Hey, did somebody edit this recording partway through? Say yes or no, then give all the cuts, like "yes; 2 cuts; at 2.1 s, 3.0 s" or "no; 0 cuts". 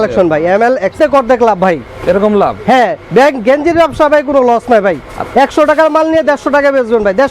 yes; 1 cut; at 0.9 s